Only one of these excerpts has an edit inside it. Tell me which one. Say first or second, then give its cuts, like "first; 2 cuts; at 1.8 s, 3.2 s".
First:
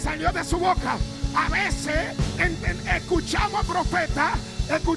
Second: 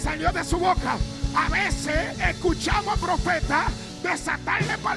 second; 2 cuts; at 2.1 s, 3.9 s